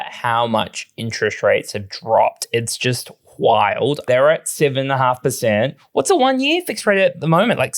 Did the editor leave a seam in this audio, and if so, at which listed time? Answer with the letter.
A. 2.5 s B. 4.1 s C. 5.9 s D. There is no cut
B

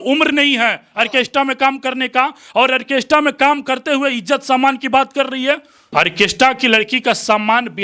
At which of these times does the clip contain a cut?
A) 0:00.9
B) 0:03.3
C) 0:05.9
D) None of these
C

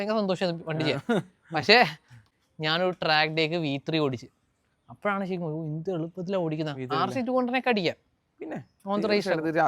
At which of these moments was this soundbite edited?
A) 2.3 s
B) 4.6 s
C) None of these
A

